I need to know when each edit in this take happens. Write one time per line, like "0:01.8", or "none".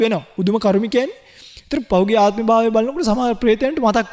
0:01.8